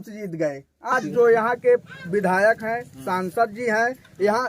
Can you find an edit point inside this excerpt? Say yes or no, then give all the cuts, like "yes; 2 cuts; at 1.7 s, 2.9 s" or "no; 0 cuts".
yes; 1 cut; at 0.9 s